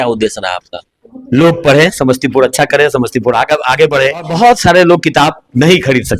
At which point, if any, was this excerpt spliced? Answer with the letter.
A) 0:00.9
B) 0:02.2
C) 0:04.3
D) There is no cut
C